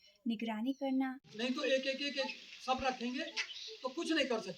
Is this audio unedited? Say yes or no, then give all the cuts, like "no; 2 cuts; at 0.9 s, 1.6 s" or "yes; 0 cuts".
no; 1 cut; at 1.2 s